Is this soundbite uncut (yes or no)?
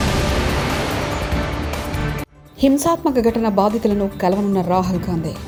yes